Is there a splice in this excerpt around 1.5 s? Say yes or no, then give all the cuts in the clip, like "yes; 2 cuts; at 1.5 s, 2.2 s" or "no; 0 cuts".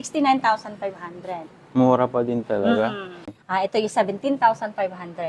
no; 1 cut; at 3.3 s